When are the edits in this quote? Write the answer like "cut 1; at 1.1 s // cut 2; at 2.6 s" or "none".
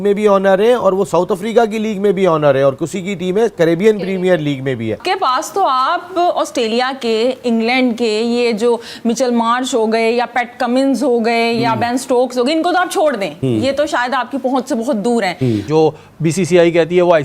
cut 1; at 5.0 s // cut 2; at 15.7 s